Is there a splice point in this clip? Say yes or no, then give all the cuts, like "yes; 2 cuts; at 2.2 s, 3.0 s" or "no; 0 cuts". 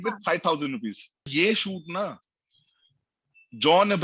yes; 1 cut; at 1.3 s